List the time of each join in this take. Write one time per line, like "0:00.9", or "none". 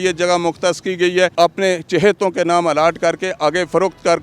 0:01.3